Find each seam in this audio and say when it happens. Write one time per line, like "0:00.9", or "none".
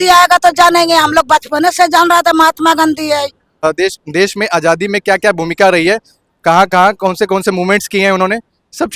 0:03.6